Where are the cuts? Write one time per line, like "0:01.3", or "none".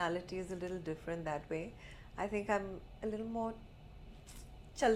none